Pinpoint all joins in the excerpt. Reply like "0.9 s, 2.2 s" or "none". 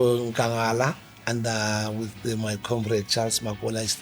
1.2 s

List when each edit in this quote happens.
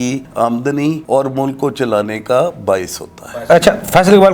none

